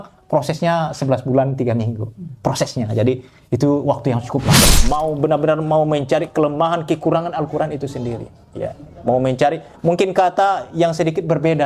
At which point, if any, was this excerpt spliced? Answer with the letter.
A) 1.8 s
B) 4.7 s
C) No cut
B